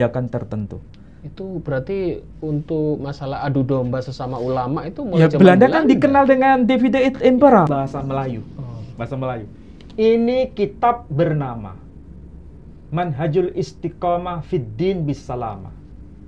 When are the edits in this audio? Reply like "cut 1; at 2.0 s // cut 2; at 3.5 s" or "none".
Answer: cut 1; at 7.7 s